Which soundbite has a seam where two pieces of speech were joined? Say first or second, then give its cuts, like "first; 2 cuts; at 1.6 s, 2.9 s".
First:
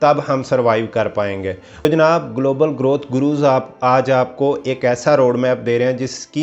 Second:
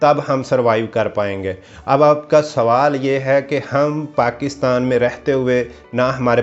first; 1 cut; at 1.6 s